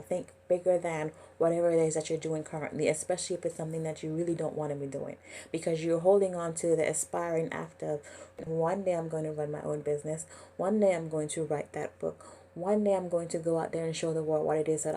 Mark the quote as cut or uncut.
cut